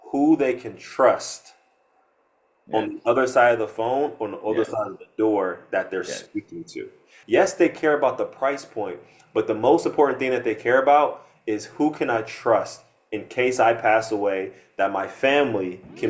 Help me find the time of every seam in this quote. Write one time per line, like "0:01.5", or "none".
0:07.1